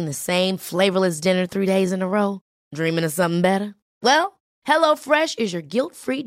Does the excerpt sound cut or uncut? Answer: uncut